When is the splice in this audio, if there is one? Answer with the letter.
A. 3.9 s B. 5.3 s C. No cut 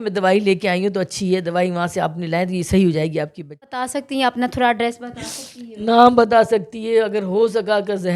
A